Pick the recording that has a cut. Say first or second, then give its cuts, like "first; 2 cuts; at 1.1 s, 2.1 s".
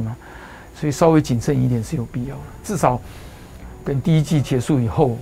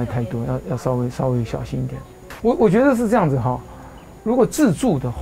second; 1 cut; at 2.3 s